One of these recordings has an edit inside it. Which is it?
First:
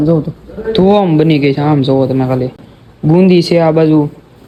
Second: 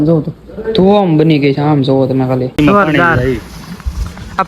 second; 1 cut; at 2.6 s

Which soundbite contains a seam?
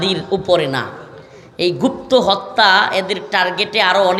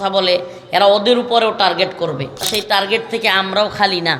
second; 1 cut; at 2.5 s

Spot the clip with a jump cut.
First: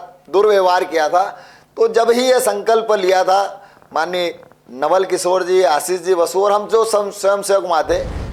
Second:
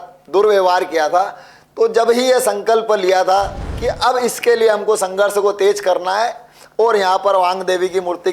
second; 1 cut; at 3.7 s

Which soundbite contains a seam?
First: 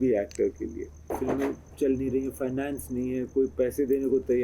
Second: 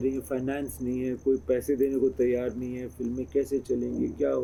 first; 1 cut; at 1.1 s

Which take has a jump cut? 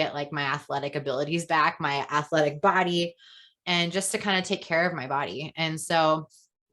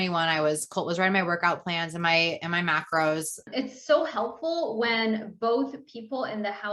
second; 1 cut; at 3.4 s

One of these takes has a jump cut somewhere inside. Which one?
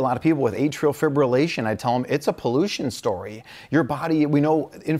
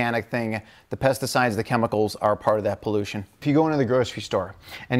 second; 1 cut; at 3.4 s

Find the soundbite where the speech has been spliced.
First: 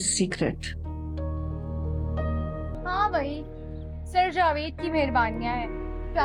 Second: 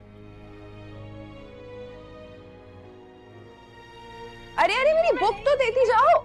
first; 1 cut; at 2.8 s

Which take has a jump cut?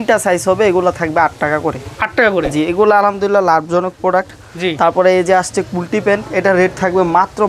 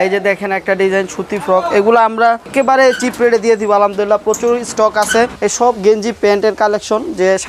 second; 2 cuts; at 2.5 s, 5.4 s

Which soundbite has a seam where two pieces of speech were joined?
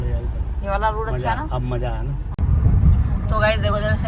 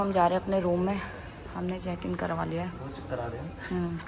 first; 1 cut; at 2.3 s

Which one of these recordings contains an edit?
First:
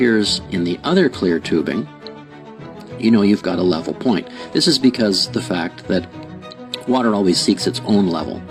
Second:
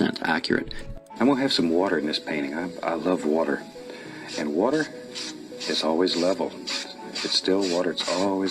second; 1 cut; at 1.0 s

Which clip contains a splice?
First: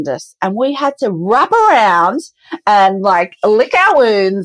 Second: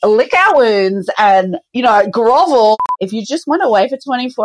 second; 1 cut; at 2.7 s

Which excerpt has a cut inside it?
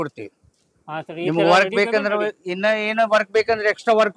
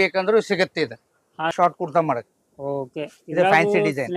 second; 1 cut; at 1.5 s

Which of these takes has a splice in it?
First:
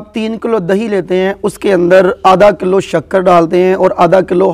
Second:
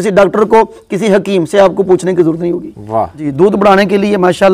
second; 1 cut; at 3.2 s

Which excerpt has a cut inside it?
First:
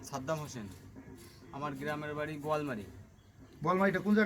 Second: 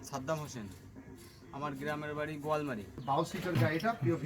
second; 1 cut; at 3.0 s

